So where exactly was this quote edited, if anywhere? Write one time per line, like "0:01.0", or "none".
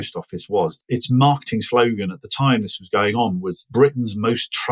0:00.7
0:03.7